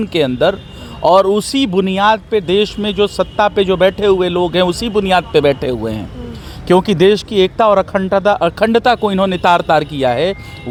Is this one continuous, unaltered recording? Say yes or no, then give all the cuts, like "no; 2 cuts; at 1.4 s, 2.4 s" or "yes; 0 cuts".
yes; 0 cuts